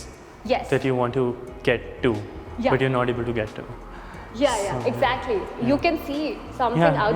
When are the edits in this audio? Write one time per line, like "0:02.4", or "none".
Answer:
none